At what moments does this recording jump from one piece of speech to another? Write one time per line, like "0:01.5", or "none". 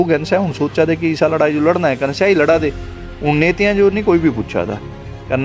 none